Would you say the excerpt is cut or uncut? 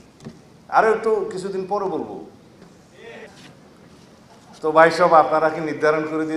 cut